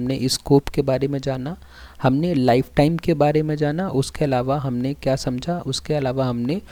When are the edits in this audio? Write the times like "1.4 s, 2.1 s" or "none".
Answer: none